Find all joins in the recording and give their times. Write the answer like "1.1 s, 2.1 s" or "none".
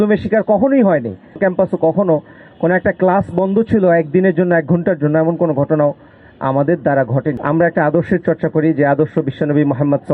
1.4 s, 7.4 s